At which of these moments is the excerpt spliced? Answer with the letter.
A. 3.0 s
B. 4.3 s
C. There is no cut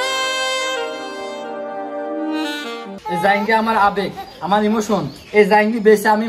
A